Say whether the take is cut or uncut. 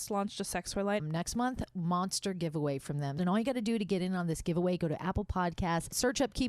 cut